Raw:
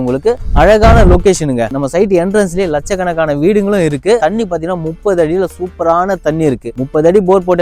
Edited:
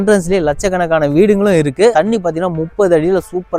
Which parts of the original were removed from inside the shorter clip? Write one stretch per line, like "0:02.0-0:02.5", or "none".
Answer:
none

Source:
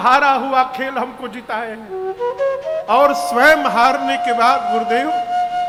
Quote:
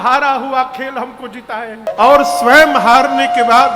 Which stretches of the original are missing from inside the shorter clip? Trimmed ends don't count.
0:01.9-0:02.8

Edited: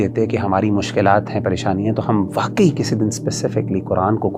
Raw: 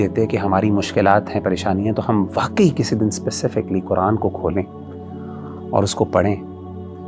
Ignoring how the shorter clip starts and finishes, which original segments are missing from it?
none

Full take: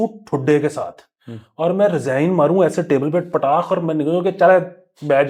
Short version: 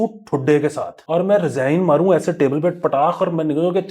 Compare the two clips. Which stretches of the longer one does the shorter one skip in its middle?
0:00.9-0:01.4

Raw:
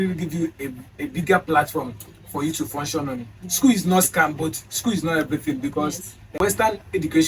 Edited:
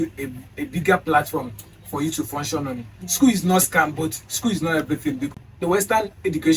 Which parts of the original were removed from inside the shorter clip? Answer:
0:05.7-0:06.0

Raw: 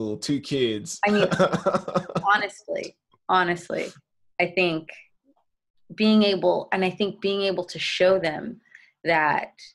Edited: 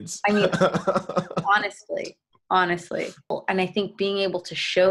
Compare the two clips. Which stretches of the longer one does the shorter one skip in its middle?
0:04.1-0:06.5

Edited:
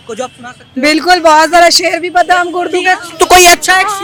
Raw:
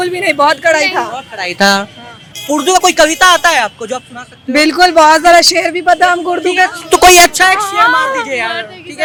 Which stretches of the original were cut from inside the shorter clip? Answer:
none

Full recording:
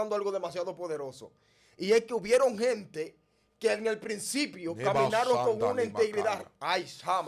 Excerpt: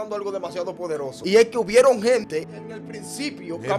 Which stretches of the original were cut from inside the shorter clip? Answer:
0:01.1-0:01.7
0:03.5-0:04.1

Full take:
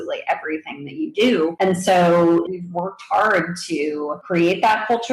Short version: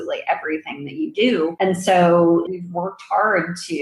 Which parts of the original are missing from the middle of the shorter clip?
none

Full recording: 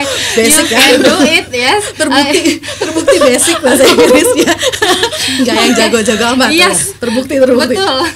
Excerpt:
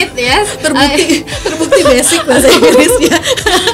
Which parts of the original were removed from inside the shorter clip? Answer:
none

